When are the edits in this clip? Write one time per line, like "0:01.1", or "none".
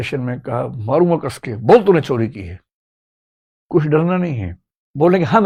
none